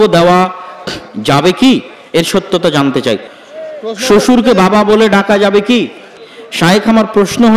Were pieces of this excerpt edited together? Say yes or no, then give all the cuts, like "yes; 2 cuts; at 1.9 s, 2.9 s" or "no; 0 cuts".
yes; 2 cuts; at 3.3 s, 6.2 s